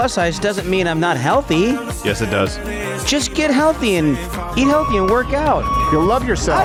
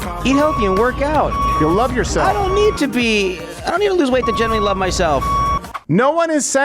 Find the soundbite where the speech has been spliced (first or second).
second